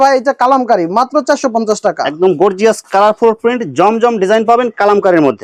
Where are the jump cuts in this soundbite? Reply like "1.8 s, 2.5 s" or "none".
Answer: none